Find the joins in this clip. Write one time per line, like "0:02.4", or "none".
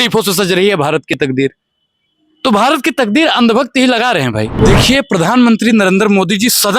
0:04.6